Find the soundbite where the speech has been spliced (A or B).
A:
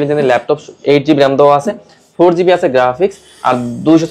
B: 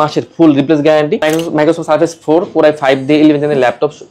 B